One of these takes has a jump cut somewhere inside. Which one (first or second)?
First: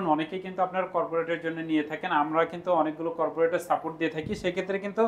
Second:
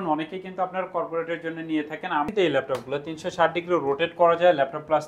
second